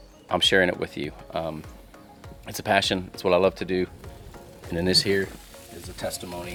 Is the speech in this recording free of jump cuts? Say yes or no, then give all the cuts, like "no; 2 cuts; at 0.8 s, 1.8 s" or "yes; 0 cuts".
yes; 0 cuts